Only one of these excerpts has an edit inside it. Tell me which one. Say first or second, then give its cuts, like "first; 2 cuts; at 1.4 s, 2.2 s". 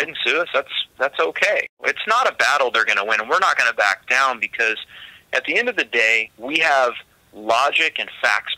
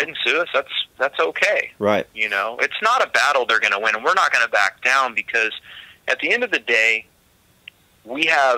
first; 2 cuts; at 1.7 s, 6.3 s